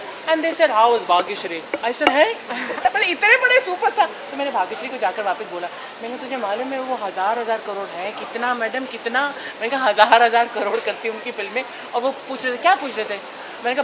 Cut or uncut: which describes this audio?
cut